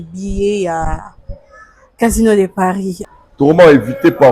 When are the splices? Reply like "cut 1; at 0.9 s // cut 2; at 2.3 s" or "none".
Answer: cut 1; at 3.0 s